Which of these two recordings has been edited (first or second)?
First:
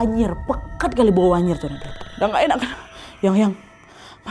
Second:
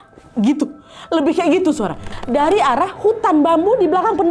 second